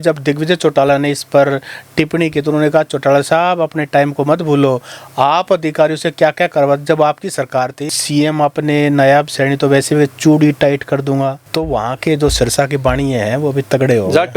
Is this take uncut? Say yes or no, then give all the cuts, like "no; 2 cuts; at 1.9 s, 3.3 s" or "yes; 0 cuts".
no; 2 cuts; at 7.8 s, 11.4 s